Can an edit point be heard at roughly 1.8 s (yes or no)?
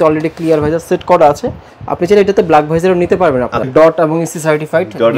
no